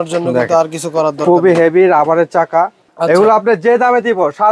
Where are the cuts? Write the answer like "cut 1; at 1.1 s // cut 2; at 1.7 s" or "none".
cut 1; at 2.8 s